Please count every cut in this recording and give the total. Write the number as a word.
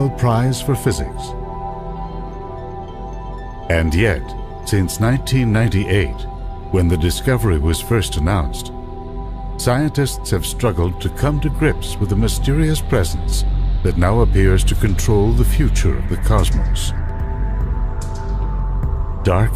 one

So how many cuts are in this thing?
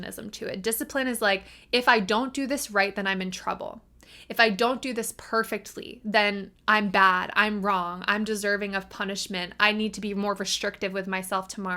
zero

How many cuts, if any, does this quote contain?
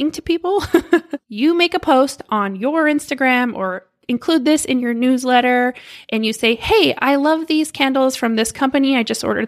one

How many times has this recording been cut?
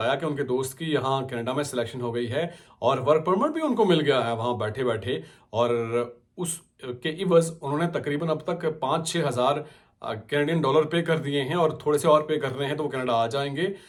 zero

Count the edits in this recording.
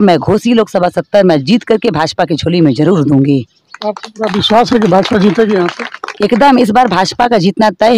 zero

